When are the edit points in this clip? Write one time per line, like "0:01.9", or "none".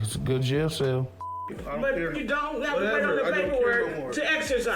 0:01.1